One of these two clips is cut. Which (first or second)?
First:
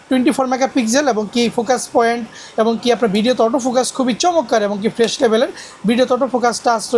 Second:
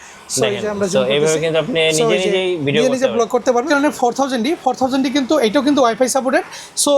second